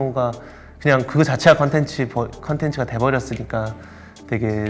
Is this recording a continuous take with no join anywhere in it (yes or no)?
yes